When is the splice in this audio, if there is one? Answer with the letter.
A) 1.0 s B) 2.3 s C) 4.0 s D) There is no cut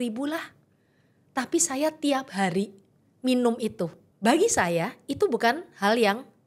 C